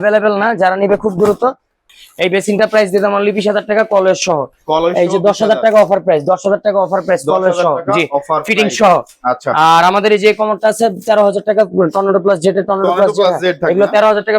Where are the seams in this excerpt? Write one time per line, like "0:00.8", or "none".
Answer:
0:01.8